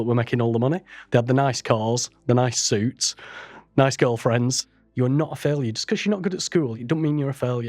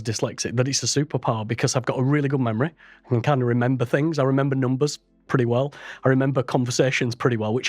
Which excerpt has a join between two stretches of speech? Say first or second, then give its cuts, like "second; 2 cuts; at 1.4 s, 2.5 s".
first; 2 cuts; at 4.7 s, 6.8 s